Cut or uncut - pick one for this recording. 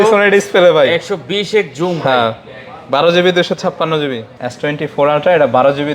cut